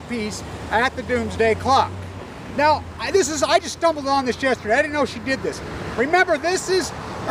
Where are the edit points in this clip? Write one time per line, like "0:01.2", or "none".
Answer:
none